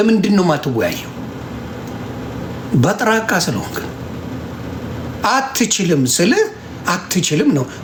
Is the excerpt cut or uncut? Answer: uncut